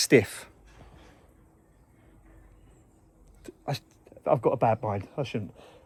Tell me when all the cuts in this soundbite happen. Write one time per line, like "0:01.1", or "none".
none